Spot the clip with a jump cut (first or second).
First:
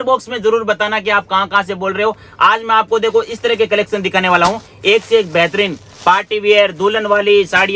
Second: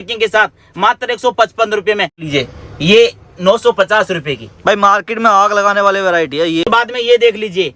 second